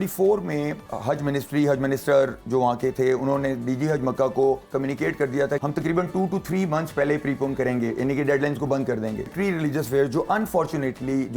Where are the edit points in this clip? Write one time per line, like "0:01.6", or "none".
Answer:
0:00.8
0:05.6
0:09.3